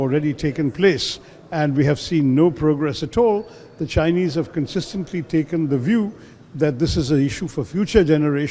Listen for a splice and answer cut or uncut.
uncut